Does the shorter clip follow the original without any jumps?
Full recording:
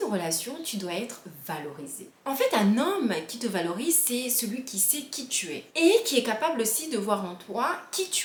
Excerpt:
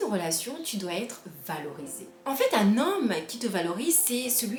yes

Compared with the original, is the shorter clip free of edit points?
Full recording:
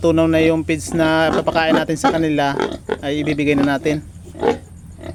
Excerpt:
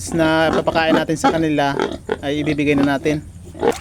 yes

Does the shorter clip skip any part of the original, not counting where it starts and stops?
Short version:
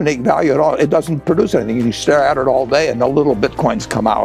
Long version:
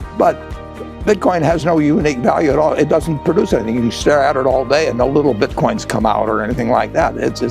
no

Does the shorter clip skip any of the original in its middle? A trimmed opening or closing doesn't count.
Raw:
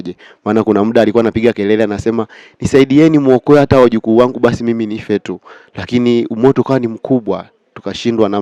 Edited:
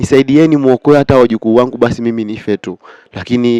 no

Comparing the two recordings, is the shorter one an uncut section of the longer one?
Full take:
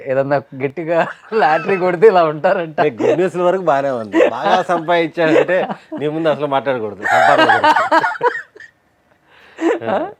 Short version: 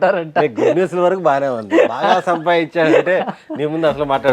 yes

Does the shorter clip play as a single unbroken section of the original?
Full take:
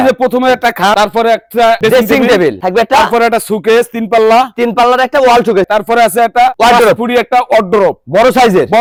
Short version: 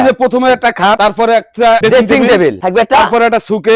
yes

